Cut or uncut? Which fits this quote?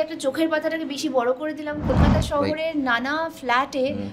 cut